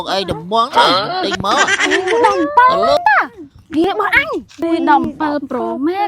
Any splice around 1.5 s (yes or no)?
no